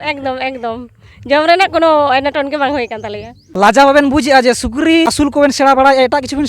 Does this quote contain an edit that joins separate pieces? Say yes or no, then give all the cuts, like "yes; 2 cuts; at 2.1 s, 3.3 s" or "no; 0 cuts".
yes; 2 cuts; at 3.5 s, 5.2 s